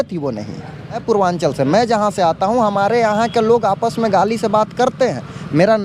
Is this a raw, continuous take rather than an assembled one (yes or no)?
no